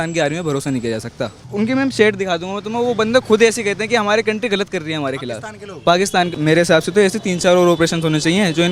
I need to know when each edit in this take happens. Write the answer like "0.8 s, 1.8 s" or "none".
1.5 s, 6.3 s